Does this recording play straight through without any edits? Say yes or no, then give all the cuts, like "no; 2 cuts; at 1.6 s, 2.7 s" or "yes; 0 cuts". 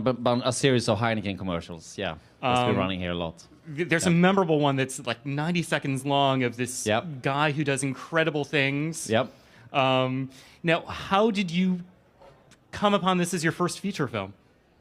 no; 1 cut; at 3.7 s